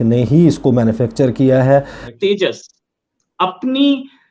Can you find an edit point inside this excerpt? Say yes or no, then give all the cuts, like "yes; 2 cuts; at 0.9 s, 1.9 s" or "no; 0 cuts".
yes; 1 cut; at 2.1 s